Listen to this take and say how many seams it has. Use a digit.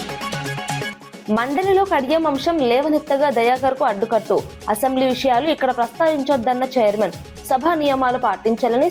1